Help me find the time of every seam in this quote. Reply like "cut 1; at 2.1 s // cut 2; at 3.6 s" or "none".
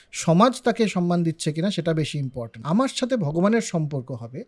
cut 1; at 2.5 s